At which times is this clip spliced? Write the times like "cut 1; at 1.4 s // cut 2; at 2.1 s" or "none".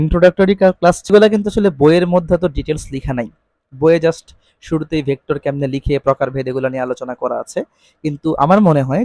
cut 1; at 1.0 s